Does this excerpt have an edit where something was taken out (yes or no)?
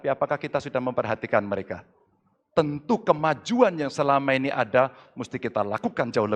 no